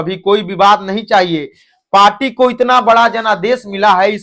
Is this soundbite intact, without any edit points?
yes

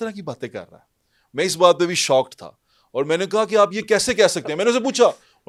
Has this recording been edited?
no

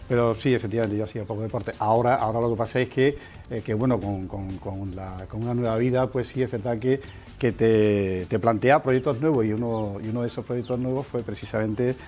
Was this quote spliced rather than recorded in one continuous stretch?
yes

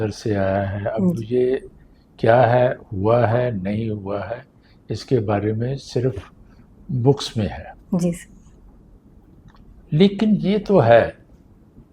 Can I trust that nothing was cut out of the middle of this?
yes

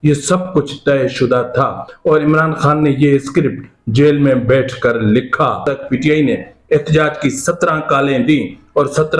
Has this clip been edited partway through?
yes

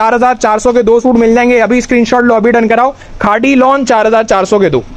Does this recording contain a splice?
no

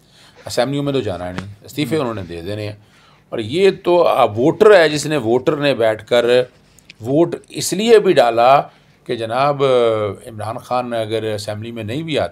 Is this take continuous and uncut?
yes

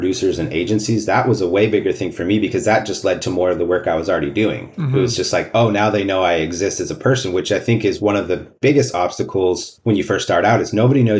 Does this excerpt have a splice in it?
no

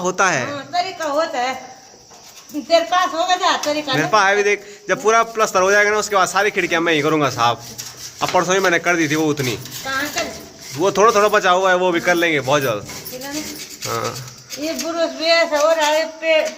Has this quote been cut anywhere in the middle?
no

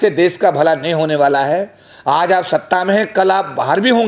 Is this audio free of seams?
yes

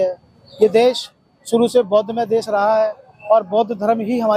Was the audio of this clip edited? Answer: no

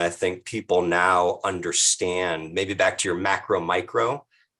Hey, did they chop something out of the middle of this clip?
no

